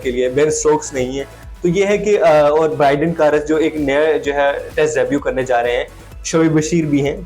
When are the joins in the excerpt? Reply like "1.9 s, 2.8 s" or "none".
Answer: none